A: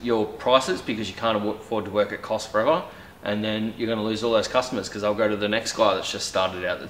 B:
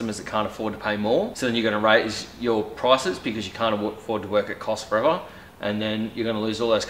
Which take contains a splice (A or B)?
B